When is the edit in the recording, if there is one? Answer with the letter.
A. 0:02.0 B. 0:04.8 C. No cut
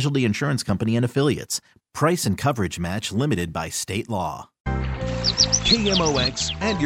B